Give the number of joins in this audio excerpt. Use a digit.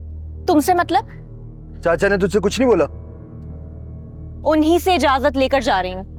0